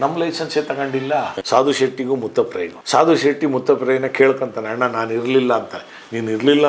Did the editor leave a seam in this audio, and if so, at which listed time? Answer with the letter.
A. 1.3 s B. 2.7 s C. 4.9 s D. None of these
A